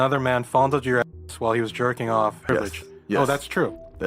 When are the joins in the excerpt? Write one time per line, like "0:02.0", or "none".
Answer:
0:02.5